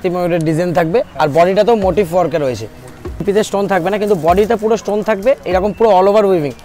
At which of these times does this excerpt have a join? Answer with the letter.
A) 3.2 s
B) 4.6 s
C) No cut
A